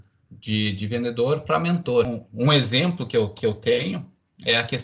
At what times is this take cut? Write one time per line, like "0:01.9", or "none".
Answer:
0:02.1